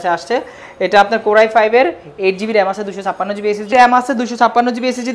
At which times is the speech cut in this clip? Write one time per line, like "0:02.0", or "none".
0:03.7